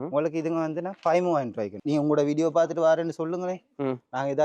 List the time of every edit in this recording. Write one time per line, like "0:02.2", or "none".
0:01.8